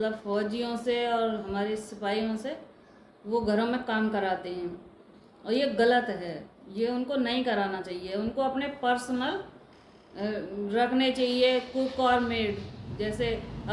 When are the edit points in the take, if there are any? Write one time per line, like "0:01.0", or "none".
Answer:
none